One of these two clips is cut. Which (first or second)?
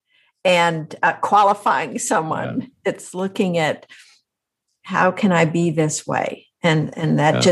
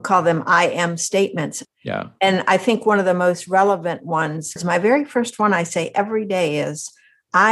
second